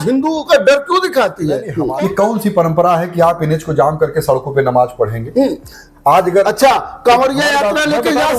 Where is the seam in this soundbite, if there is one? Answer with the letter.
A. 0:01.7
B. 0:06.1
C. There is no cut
A